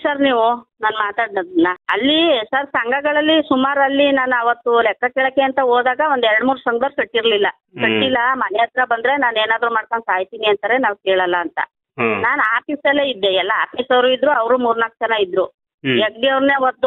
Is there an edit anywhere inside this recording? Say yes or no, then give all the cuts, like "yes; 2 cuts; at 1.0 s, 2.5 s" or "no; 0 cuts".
yes; 1 cut; at 1.8 s